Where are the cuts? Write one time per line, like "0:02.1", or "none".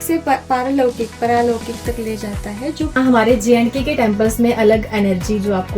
0:02.9